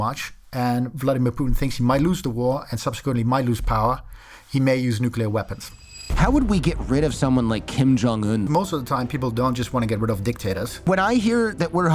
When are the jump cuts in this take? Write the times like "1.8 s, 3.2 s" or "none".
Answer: 6.0 s, 8.5 s, 10.9 s